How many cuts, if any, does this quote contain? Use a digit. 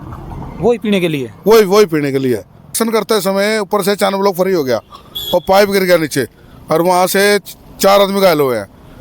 1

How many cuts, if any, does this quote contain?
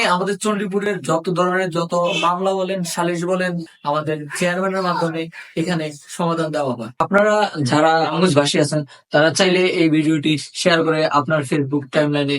2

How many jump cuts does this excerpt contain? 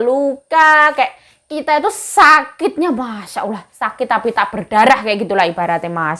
0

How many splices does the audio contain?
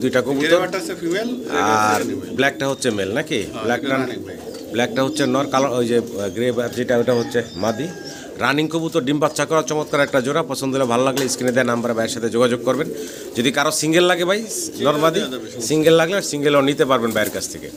0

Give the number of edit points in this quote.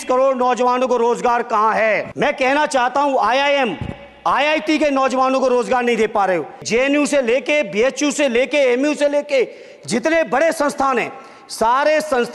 2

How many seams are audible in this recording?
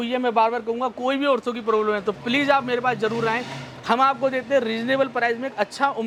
0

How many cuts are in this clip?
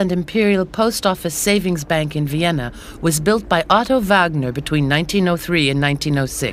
0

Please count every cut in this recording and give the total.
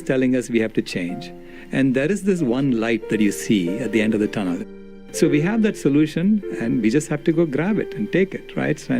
1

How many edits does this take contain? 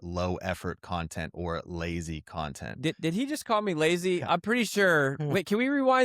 1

